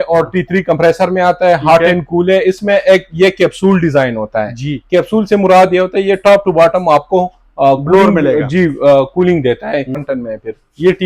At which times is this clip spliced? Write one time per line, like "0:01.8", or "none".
0:10.0

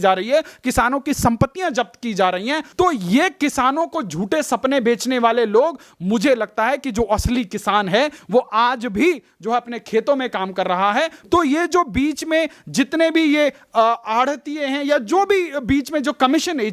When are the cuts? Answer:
0:02.7
0:11.2

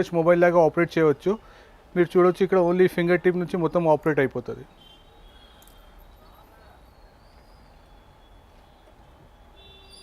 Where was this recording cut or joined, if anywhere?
none

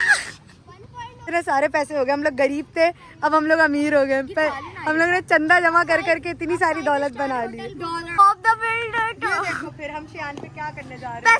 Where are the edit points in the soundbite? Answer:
0:01.3
0:08.2

